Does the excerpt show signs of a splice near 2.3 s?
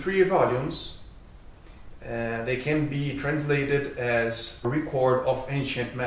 yes; 1 cut; at 2.3 s

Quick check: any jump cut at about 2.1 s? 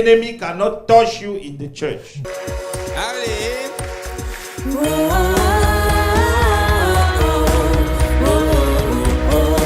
yes; 1 cut; at 2.1 s

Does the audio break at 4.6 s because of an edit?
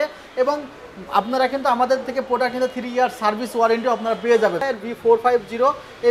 yes; 1 cut; at 4.6 s

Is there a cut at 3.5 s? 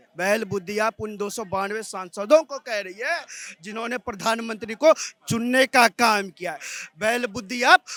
no; 0 cuts

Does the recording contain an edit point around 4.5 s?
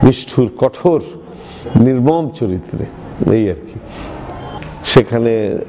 yes; 1 cut; at 4.5 s

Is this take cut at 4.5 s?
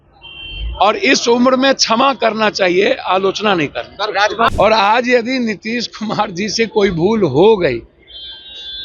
yes; 1 cut; at 4.5 s

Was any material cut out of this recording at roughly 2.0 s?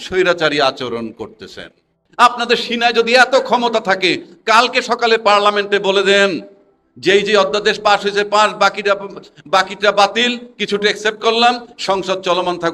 yes; 1 cut; at 2.0 s

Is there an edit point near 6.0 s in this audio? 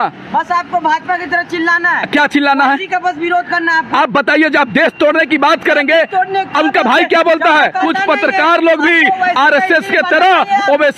no; 1 cut; at 7.8 s

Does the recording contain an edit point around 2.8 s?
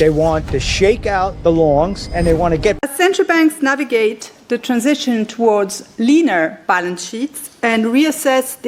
yes; 1 cut; at 2.8 s

